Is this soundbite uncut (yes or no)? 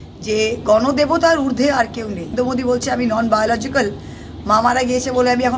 no